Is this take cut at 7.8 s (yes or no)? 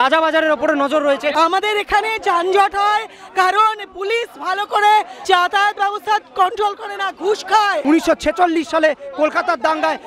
yes